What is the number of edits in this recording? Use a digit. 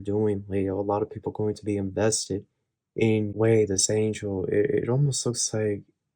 1